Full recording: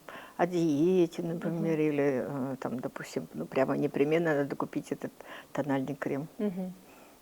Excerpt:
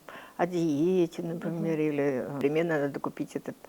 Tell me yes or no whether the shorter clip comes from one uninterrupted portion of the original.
no